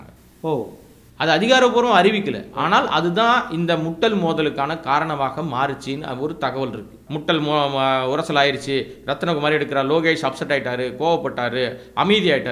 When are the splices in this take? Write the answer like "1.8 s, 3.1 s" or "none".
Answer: 7.0 s